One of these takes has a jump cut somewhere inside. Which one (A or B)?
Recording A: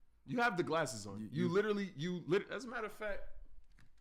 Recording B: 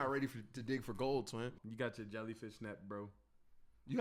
B